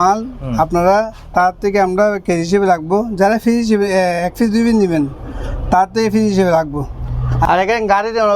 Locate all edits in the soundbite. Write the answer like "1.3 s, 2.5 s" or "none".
7.5 s